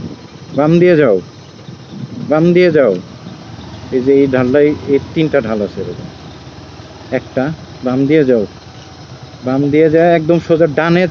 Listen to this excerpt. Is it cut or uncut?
uncut